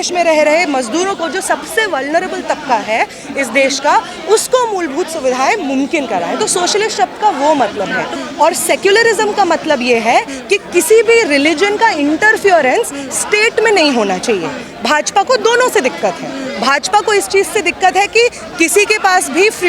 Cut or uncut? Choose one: cut